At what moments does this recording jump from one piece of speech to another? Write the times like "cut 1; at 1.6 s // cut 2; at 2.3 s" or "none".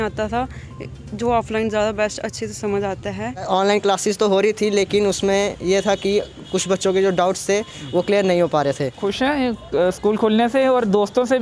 cut 1; at 3.5 s // cut 2; at 8.9 s

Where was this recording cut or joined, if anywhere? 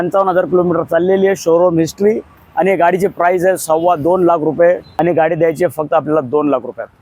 cut 1; at 4.9 s

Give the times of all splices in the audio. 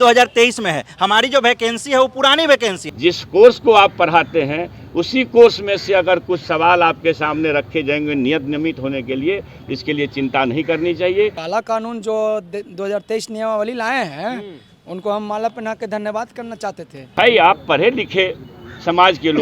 cut 1; at 2.9 s // cut 2; at 11.4 s // cut 3; at 17.1 s

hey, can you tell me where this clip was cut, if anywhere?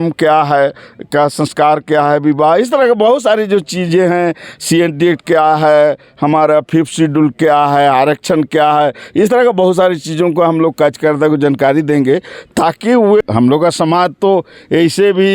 cut 1; at 13.2 s

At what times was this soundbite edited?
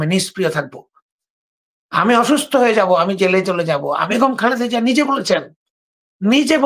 cut 1; at 4.1 s

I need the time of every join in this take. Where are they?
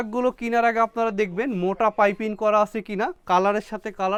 none

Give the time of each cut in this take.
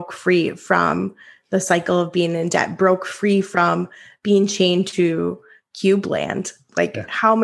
none

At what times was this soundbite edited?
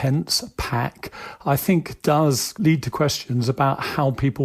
cut 1; at 2.6 s

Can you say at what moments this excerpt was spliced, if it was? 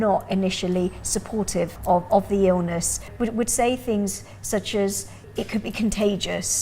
cut 1; at 1.8 s // cut 2; at 3.1 s // cut 3; at 5.2 s

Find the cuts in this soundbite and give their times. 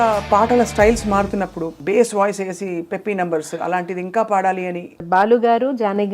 cut 1; at 1.6 s // cut 2; at 5.0 s

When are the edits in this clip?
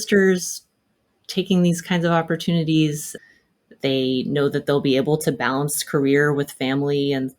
cut 1; at 3.1 s

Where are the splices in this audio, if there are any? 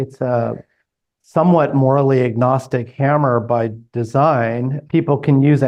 none

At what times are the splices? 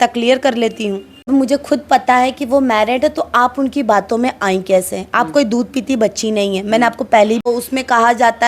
cut 1; at 1.3 s // cut 2; at 7.4 s

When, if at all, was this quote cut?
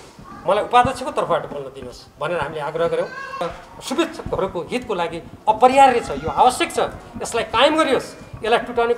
cut 1; at 3.4 s

